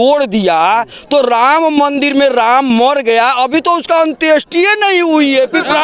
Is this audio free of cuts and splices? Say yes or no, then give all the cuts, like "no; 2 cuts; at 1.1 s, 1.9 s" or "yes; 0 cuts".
yes; 0 cuts